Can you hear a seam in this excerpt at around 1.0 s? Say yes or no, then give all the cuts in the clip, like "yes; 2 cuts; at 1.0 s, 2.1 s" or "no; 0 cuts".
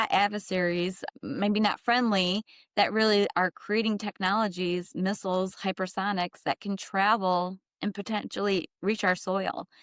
yes; 1 cut; at 1.0 s